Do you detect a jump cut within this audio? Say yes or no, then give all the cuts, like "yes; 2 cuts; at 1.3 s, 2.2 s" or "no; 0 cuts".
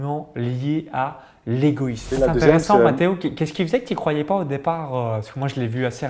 yes; 1 cut; at 2.1 s